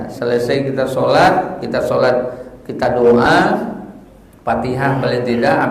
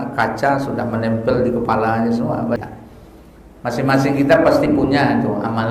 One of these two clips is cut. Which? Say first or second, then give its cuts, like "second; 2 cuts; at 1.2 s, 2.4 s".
second; 1 cut; at 2.6 s